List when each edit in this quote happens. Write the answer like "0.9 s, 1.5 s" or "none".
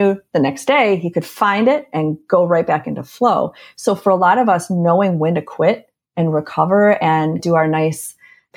7.4 s